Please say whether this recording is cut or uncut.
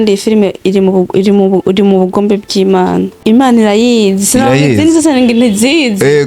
cut